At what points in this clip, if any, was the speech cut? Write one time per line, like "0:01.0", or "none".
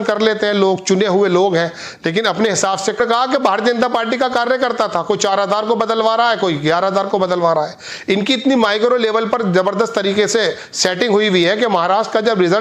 0:03.0